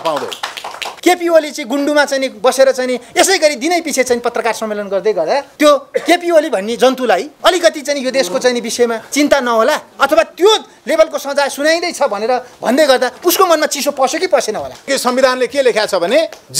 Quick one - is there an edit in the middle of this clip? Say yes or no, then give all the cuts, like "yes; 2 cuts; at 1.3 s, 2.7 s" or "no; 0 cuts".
yes; 5 cuts; at 0.9 s, 5.5 s, 7.3 s, 9.0 s, 14.9 s